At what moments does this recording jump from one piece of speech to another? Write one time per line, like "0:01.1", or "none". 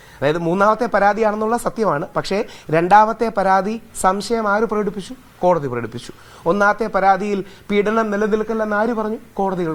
none